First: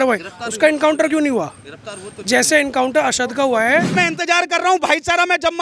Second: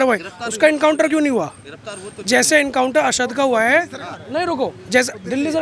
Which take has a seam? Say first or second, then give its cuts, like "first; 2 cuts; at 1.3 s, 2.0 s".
first; 1 cut; at 3.9 s